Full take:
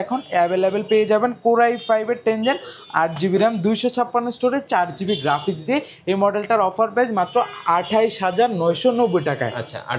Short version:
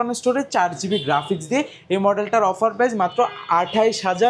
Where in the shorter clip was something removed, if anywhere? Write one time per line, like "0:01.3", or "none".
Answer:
none